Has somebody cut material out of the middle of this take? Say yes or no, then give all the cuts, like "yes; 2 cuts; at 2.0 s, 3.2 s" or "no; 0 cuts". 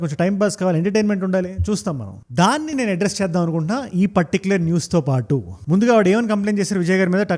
no; 0 cuts